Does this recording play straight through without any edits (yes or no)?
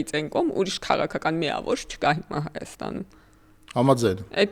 yes